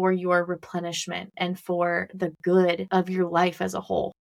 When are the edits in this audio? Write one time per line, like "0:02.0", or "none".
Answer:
0:02.8